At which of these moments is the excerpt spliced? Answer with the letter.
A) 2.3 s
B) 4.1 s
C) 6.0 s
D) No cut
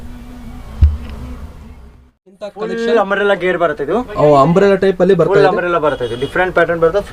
A